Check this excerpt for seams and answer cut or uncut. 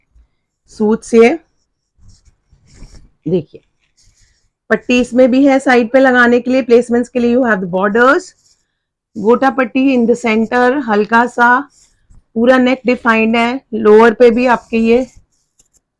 uncut